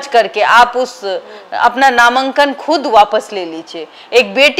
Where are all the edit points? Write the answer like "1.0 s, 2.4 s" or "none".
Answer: none